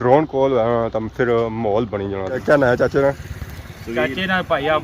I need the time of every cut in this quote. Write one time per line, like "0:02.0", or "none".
0:02.4